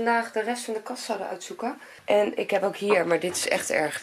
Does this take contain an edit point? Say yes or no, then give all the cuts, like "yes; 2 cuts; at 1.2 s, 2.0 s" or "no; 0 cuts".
yes; 1 cut; at 1.9 s